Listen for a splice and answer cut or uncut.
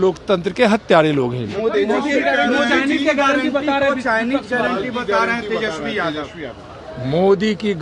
uncut